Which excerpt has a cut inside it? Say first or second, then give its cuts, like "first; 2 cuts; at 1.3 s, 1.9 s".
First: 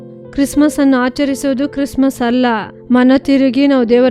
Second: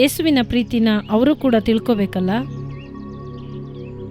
second; 1 cut; at 2.5 s